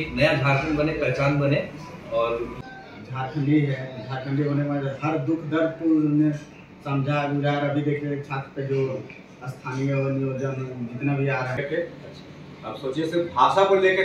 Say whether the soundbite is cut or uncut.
cut